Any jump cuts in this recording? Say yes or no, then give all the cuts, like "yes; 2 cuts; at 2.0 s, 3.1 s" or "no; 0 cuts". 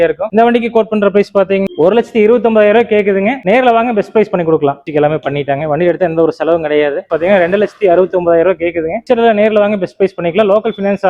yes; 2 cuts; at 4.8 s, 7.0 s